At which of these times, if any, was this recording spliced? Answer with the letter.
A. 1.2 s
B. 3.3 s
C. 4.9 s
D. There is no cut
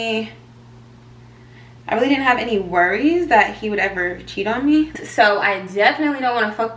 C